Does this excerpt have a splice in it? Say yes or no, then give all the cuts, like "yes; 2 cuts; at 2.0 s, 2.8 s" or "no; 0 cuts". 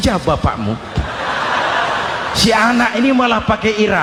no; 0 cuts